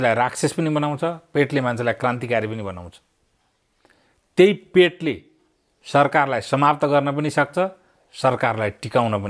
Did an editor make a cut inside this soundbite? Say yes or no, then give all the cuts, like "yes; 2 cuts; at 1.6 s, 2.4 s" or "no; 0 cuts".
no; 0 cuts